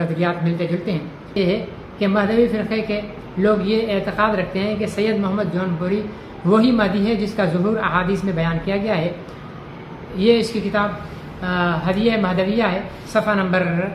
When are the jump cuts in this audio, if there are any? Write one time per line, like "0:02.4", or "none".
0:01.4